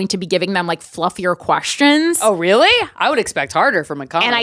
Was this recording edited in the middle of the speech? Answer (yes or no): no